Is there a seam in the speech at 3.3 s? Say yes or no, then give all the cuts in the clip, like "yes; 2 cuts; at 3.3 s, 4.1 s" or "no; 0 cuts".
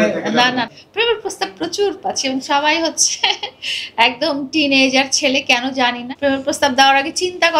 no; 1 cut; at 6.1 s